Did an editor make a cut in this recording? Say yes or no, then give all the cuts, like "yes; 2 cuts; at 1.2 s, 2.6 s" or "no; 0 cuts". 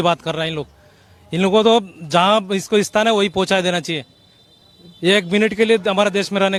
no; 0 cuts